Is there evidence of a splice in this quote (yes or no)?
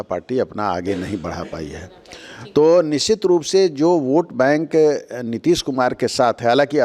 no